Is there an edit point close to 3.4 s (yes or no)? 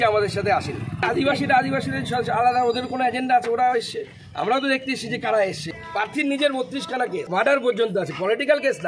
no